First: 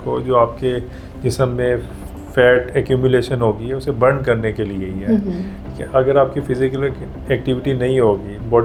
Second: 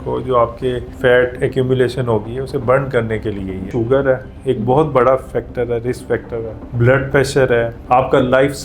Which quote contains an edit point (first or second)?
second